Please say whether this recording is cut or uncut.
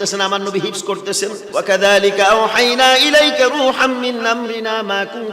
cut